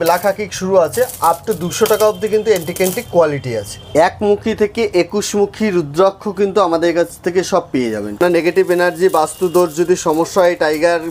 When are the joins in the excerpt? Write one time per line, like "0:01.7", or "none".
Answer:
0:03.8
0:08.2